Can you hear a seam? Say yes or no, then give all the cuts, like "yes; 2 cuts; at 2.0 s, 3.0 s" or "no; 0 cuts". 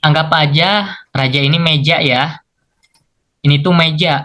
yes; 1 cut; at 1.0 s